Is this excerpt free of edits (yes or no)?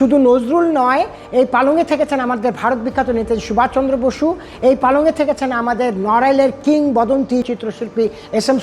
no